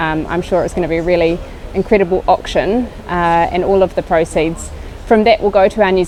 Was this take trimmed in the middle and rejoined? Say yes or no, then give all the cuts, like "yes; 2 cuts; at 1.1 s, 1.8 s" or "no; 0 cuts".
no; 0 cuts